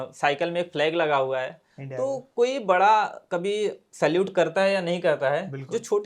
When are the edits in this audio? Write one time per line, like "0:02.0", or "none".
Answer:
none